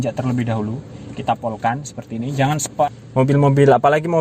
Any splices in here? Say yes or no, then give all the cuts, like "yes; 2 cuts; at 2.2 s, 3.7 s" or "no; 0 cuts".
yes; 1 cut; at 2.9 s